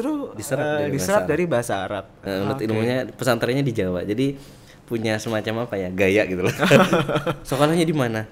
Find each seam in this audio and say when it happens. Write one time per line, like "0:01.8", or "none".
0:02.2